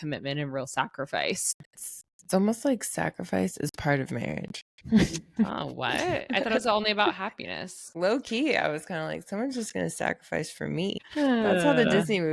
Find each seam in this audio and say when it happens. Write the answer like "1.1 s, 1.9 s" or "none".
1.5 s, 7.8 s, 11.0 s